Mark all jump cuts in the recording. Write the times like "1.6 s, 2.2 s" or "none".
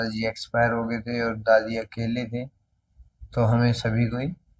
none